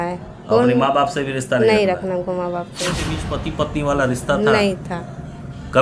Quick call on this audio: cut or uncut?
cut